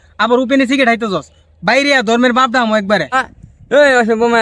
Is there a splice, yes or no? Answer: yes